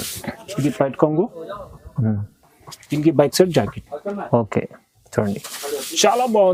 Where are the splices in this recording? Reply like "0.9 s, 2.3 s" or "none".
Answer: none